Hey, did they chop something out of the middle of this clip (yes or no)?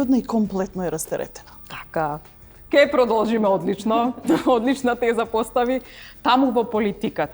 no